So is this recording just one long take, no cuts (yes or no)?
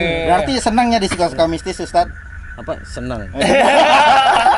yes